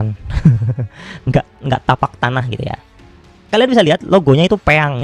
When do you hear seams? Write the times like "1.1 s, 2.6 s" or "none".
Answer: 3.2 s